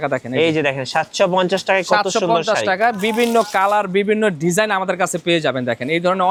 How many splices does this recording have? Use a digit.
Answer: 0